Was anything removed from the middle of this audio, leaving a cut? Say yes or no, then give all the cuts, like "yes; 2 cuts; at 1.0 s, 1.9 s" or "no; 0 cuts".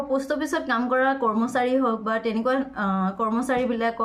no; 0 cuts